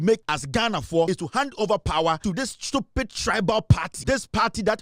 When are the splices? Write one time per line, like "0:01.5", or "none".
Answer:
0:00.8
0:02.2
0:03.9

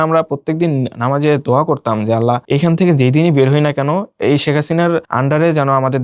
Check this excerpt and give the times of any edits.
0:02.4
0:04.1
0:05.1

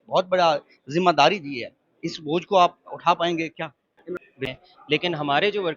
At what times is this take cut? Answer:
0:04.2

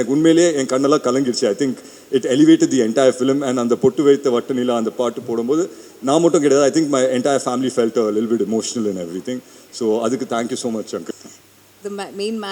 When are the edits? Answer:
0:11.1

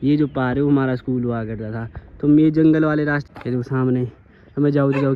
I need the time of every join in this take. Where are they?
0:03.2

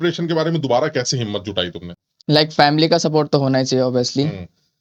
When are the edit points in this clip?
none

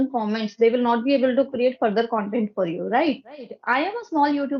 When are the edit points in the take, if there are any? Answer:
0:03.5

